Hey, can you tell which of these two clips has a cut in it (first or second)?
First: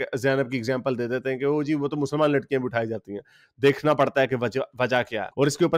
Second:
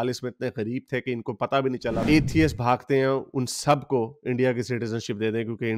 second